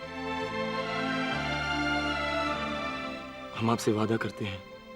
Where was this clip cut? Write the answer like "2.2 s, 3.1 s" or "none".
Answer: 1.1 s, 2.9 s